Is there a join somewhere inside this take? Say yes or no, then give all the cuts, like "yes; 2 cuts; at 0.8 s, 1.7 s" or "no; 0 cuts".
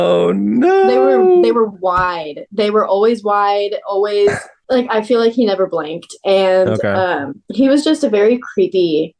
no; 0 cuts